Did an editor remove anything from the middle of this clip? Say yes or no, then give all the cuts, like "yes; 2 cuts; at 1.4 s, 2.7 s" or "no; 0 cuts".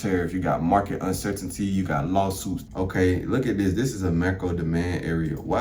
yes; 1 cut; at 2.6 s